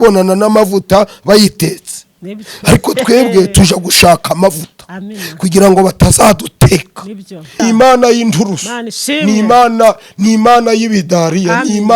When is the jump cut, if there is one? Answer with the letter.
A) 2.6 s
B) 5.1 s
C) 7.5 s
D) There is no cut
C